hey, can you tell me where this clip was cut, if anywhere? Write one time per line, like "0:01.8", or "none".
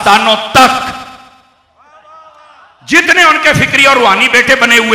none